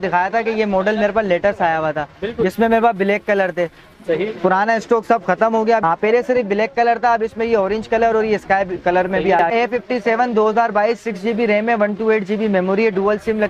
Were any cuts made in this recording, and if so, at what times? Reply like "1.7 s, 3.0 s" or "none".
5.8 s, 9.5 s